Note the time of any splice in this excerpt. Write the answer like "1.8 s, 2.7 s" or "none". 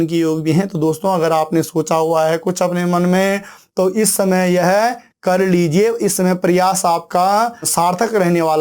7.7 s